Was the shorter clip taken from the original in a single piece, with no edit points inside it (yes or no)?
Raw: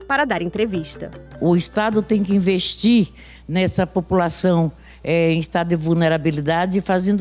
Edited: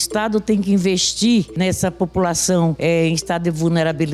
no